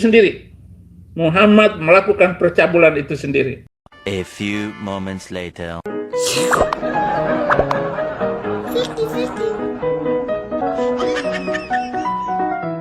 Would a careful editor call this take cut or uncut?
cut